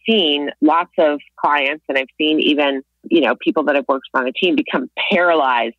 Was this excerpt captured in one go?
no; 1 cut; at 3.0 s

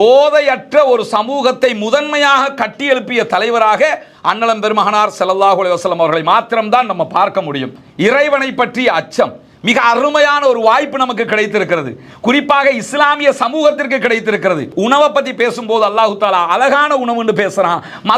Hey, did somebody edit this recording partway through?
yes; 2 cuts; at 7.8 s, 14.7 s

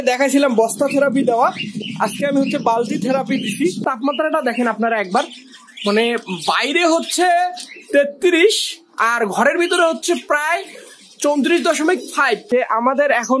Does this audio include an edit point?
yes; 2 cuts; at 3.8 s, 12.4 s

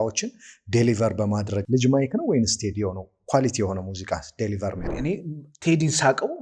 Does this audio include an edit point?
yes; 2 cuts; at 1.6 s, 4.8 s

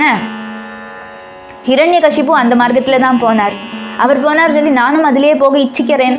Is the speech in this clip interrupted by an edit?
no; 0 cuts

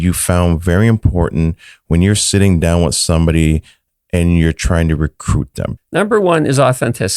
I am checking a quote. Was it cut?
yes; 1 cut; at 5.7 s

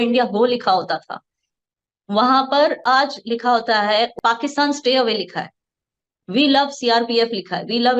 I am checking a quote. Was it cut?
yes; 1 cut; at 4.2 s

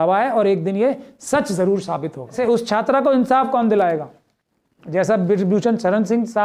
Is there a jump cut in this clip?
yes; 1 cut; at 2.4 s

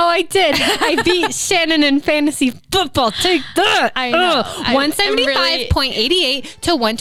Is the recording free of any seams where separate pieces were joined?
yes; 0 cuts

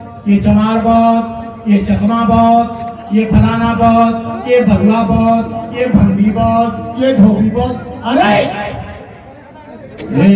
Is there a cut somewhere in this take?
no; 0 cuts

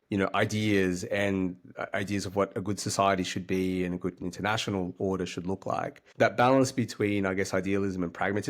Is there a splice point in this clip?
yes; 1 cut; at 6.0 s

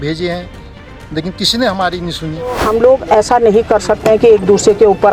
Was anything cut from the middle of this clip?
yes; 1 cut; at 2.6 s

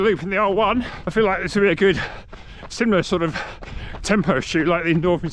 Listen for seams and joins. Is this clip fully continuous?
no; 1 cut; at 1.0 s

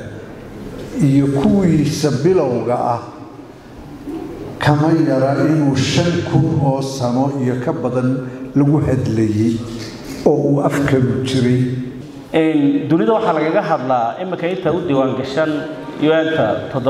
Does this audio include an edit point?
yes; 1 cut; at 11.8 s

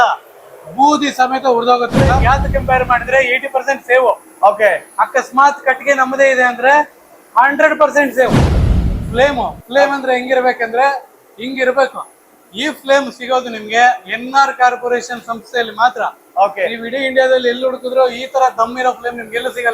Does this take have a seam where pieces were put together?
yes; 2 cuts; at 2.1 s, 8.6 s

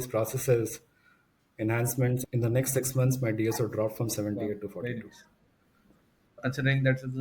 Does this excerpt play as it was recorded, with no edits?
no; 2 cuts; at 2.2 s, 6.4 s

